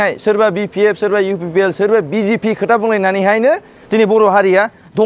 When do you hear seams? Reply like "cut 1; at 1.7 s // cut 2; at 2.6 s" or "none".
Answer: none